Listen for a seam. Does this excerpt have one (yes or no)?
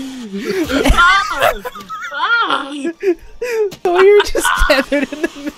yes